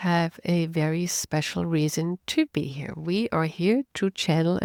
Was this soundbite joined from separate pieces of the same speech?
no; 0 cuts

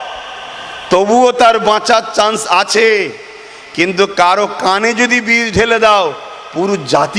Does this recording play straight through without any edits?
yes; 0 cuts

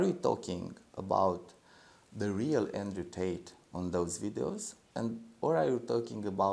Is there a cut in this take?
no; 0 cuts

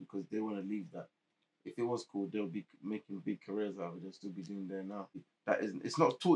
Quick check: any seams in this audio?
yes; 1 cut; at 5.3 s

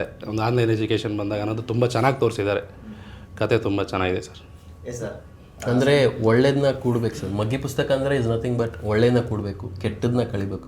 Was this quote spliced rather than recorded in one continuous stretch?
no; 0 cuts

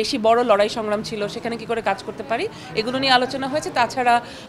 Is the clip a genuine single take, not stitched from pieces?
yes; 0 cuts

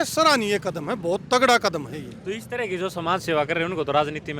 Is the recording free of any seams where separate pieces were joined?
yes; 0 cuts

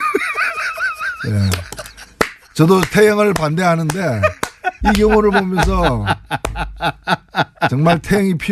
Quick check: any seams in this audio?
no; 0 cuts

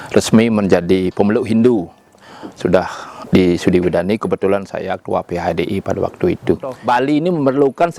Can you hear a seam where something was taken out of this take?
yes; 1 cut; at 6.8 s

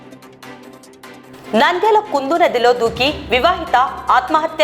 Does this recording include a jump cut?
yes; 1 cut; at 1.3 s

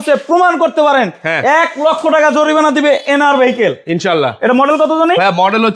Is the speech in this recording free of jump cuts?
yes; 0 cuts

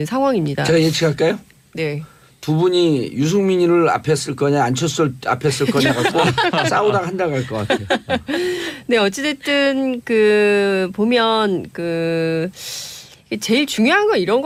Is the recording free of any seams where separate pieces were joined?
yes; 0 cuts

